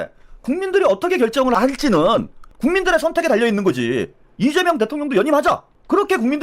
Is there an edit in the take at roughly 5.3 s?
no; 2 cuts; at 1.5 s, 2.4 s

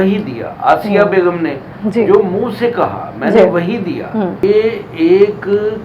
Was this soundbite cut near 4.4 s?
yes; 1 cut; at 4.4 s

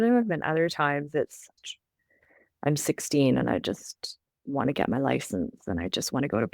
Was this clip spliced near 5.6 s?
no; 1 cut; at 1.5 s

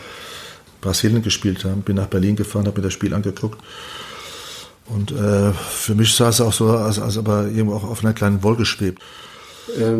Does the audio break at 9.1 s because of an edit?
yes; 1 cut; at 9.1 s

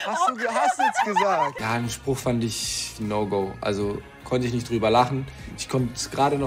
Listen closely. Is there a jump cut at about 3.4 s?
no; 1 cut; at 1.6 s

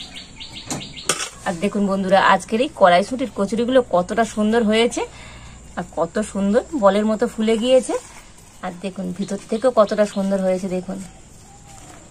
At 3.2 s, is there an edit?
no; 1 cut; at 1.3 s

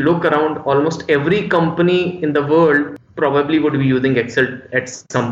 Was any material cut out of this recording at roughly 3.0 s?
yes; 1 cut; at 3.0 s

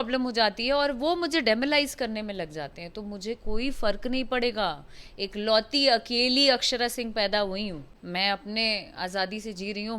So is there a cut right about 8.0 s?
yes; 1 cut; at 8.0 s

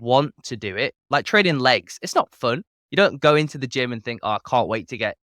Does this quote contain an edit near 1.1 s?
yes; 1 cut; at 1.1 s

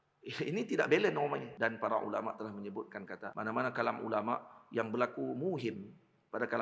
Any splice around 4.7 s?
no; 2 cuts; at 1.5 s, 3.3 s

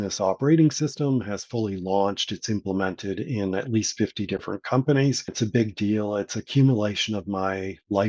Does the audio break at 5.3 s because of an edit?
yes; 1 cut; at 5.3 s

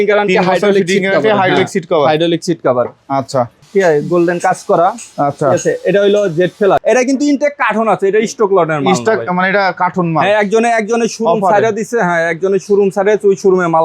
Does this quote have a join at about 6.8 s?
yes; 2 cuts; at 3.6 s, 6.8 s

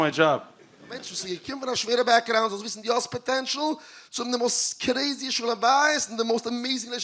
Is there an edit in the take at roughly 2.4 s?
no; 1 cut; at 1.1 s

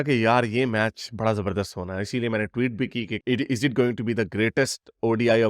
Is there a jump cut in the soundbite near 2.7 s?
no; 0 cuts

